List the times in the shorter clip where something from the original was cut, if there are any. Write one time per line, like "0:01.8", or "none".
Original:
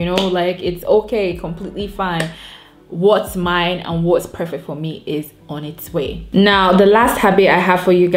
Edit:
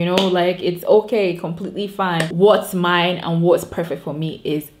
0:02.3